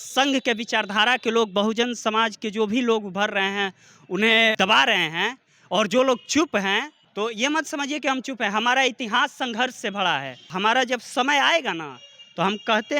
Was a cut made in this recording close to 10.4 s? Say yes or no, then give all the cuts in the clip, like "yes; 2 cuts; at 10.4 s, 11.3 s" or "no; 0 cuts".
yes; 3 cuts; at 4.6 s, 7.0 s, 10.4 s